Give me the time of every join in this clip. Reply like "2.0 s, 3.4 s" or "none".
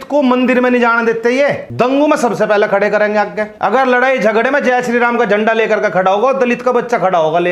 1.6 s, 3.4 s

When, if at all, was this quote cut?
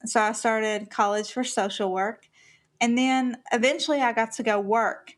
3.4 s

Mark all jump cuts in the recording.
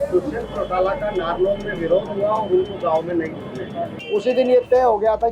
3.9 s

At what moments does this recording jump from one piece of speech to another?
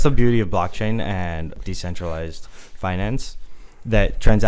1.6 s

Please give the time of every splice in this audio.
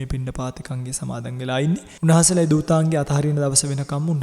1.9 s

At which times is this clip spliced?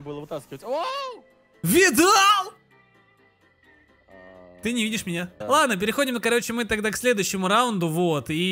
5.3 s

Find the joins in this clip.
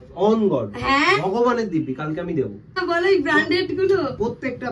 2.8 s

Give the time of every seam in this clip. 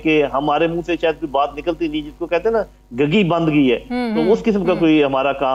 none

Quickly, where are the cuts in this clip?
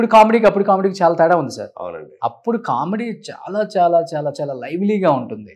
none

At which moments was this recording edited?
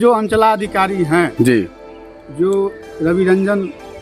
none

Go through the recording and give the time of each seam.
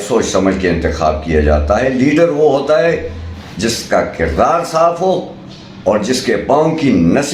none

